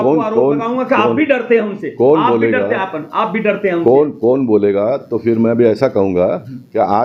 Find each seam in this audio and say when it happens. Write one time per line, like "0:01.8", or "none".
none